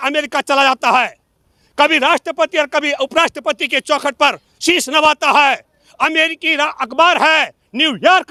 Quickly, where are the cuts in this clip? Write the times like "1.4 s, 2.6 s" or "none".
none